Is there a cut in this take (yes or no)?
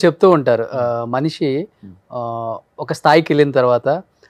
no